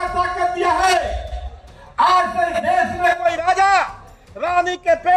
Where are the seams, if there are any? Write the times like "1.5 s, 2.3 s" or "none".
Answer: none